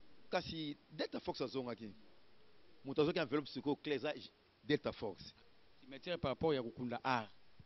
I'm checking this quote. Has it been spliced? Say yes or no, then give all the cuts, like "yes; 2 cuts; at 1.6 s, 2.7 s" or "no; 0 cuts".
yes; 1 cut; at 5.3 s